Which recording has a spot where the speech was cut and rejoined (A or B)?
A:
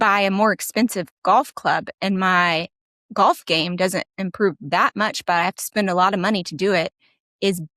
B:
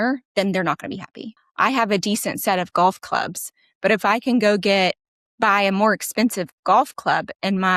B